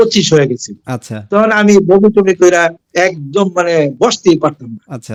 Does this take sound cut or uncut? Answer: uncut